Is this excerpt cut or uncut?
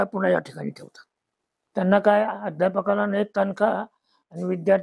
uncut